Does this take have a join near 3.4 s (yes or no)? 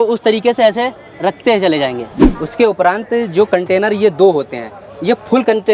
no